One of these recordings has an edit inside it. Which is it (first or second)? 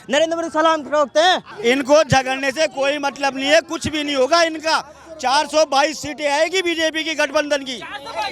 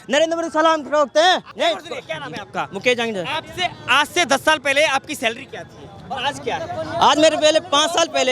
first